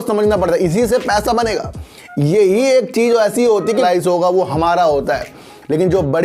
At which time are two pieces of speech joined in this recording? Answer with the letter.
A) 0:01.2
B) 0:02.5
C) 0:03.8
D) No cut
C